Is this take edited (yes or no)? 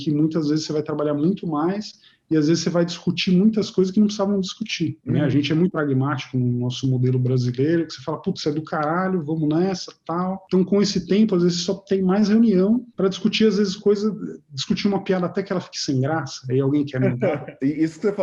no